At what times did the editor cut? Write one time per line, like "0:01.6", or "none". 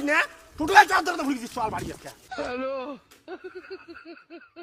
none

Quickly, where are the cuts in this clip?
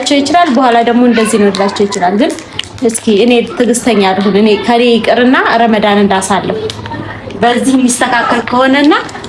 none

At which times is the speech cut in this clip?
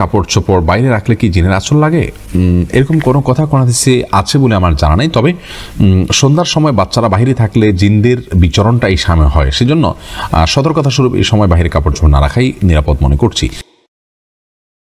none

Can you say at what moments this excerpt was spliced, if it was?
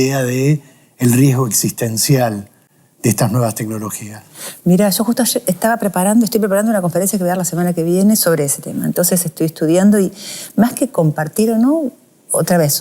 none

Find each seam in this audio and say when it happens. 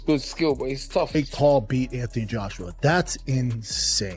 0:01.1

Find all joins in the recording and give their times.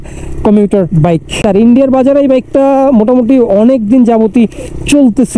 0:01.4

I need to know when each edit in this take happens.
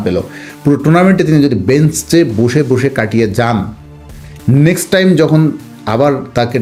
none

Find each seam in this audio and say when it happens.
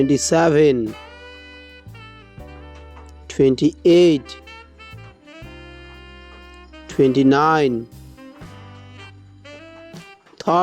0:01.6
0:03.3
0:04.5
0:06.4

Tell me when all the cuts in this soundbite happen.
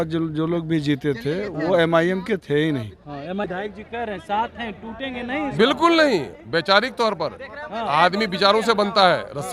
0:03.5

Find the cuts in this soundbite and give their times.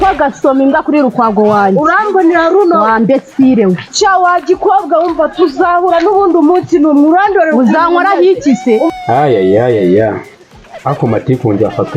0:08.9

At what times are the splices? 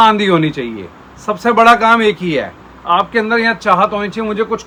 none

